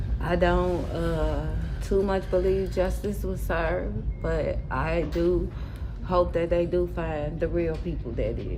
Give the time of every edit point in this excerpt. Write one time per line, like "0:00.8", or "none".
none